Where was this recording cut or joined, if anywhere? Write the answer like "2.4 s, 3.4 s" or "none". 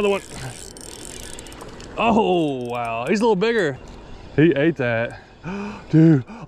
3.8 s